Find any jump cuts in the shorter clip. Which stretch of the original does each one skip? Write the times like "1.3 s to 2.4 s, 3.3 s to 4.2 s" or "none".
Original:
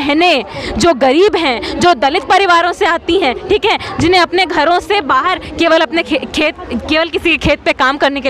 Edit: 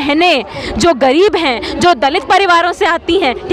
none